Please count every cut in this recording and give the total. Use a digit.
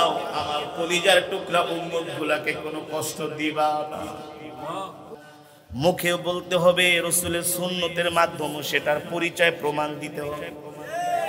1